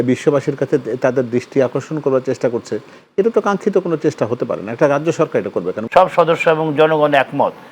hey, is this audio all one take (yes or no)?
no